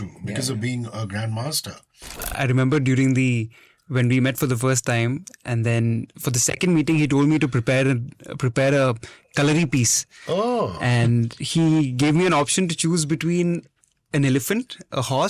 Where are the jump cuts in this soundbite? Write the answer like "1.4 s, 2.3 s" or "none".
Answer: 2.2 s